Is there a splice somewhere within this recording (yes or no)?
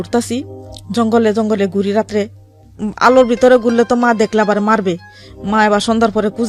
no